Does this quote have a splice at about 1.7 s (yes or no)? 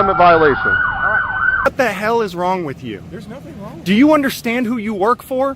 yes